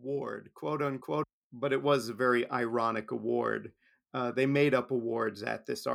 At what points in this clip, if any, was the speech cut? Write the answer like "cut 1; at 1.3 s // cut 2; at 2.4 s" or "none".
cut 1; at 1.1 s